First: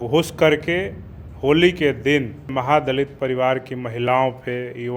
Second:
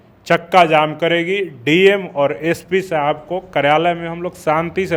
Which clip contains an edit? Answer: first; 1 cut; at 2.5 s

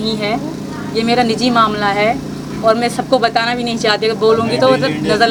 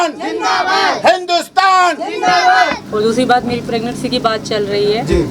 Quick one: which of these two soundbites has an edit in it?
second; 1 cut; at 2.8 s

